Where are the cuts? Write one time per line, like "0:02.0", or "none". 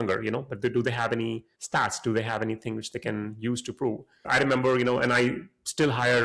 none